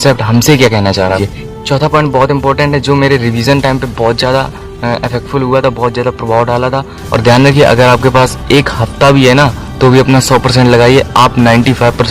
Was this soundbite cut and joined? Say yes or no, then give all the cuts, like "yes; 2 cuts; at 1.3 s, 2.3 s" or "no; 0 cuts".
yes; 2 cuts; at 1.2 s, 6.9 s